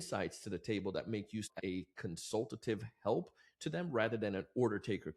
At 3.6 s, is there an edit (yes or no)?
no